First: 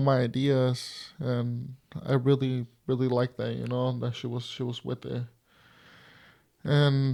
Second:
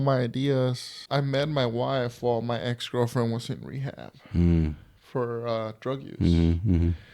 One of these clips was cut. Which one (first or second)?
second